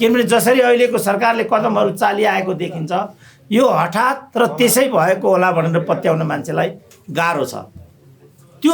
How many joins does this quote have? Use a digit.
0